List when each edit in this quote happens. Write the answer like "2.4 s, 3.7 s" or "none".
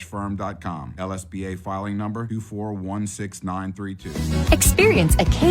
4.1 s